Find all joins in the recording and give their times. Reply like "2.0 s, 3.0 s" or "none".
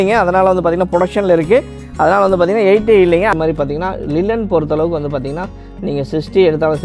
3.3 s